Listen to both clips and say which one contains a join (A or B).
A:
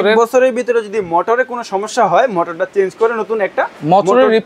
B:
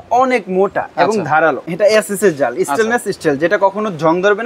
B